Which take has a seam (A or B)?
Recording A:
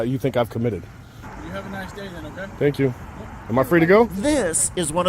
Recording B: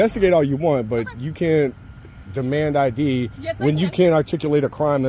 A